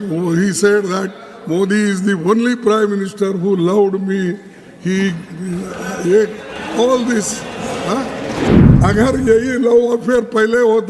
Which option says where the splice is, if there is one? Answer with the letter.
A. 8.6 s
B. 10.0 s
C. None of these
A